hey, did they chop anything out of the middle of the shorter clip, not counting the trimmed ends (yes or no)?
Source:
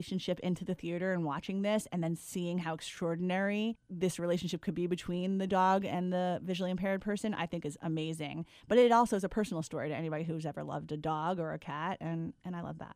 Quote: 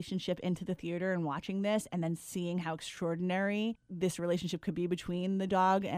no